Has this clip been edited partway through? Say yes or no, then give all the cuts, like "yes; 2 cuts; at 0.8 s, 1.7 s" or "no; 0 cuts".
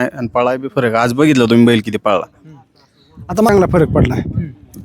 yes; 1 cut; at 3.5 s